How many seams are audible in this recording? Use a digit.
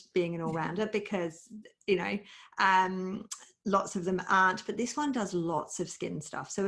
0